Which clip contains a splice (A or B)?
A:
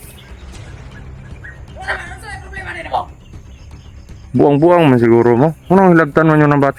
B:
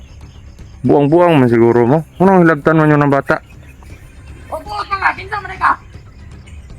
B